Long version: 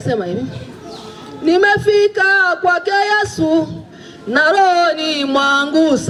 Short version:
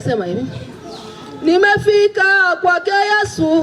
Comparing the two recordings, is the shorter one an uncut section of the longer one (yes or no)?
yes